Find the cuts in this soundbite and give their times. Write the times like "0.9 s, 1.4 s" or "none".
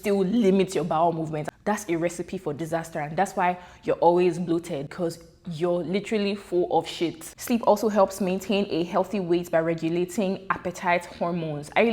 1.4 s, 4.9 s, 7.3 s